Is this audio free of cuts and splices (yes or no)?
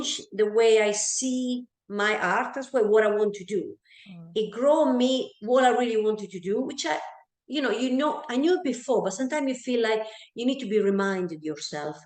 yes